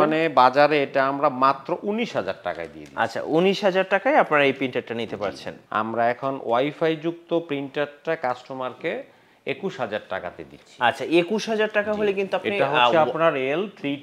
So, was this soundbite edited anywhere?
yes; 1 cut; at 5.5 s

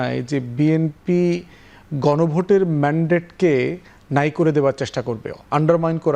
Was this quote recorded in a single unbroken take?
yes; 0 cuts

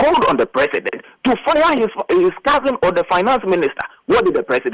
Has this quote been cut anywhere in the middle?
no; 0 cuts

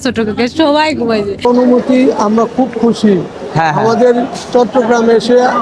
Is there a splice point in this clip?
yes; 1 cut; at 1.5 s

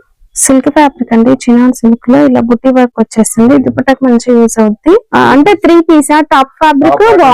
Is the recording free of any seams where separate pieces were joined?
no; 1 cut; at 5.1 s

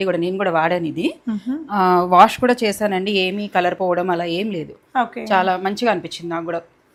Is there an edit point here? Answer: no; 0 cuts

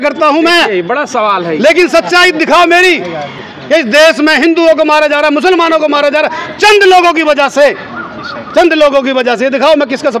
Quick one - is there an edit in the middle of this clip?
no; 0 cuts

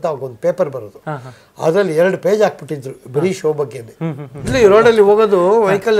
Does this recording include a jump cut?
yes; 1 cut; at 4.5 s

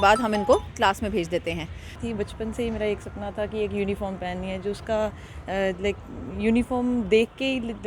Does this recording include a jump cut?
yes; 1 cut; at 2.0 s

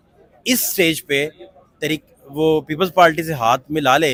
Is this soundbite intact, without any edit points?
yes; 0 cuts

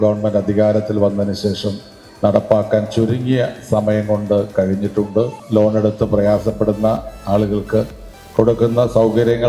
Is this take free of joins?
no; 1 cut; at 5.4 s

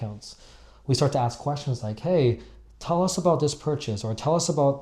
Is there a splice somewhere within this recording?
no; 0 cuts

